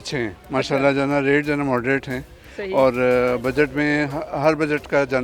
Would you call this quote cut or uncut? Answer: uncut